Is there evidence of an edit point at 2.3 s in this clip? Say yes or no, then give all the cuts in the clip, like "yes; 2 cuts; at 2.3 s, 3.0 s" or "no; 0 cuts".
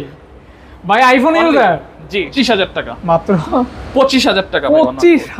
yes; 1 cut; at 2.3 s